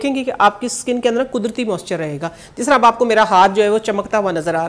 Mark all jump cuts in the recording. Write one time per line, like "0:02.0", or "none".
none